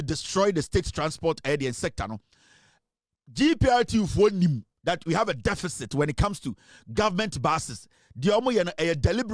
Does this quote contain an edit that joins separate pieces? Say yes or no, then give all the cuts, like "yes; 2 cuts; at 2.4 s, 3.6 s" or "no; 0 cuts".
no; 0 cuts